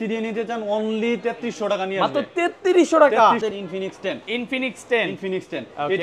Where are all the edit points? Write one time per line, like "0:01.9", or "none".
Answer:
0:03.4